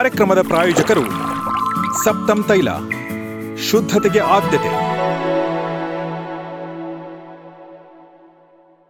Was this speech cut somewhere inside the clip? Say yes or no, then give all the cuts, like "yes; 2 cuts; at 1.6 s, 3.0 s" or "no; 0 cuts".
no; 0 cuts